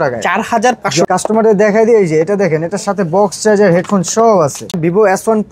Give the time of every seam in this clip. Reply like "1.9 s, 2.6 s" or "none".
1.1 s, 4.8 s